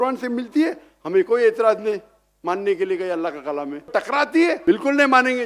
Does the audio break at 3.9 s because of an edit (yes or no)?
yes